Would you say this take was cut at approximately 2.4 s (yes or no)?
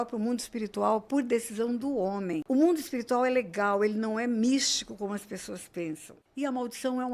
yes